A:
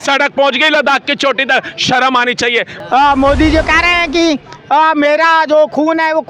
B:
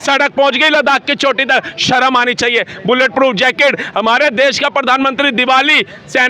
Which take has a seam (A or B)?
A